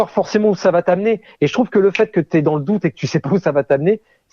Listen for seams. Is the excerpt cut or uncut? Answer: uncut